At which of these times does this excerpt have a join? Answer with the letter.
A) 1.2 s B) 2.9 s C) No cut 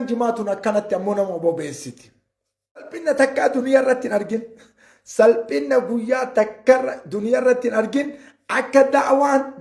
B